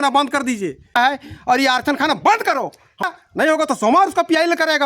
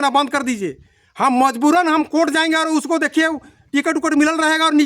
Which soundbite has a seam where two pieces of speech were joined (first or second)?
first